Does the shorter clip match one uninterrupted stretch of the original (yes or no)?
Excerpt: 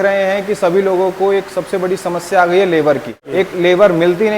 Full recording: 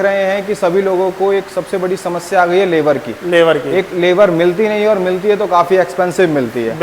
no